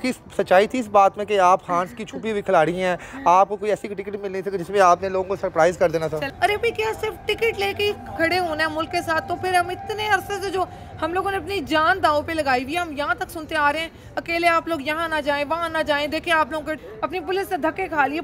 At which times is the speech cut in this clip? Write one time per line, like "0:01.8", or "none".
0:06.3
0:16.8